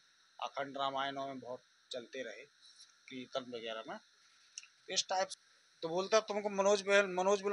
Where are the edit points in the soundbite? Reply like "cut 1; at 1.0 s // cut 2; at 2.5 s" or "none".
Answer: cut 1; at 5.4 s